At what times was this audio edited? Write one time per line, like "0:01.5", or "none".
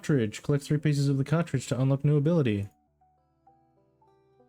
0:02.8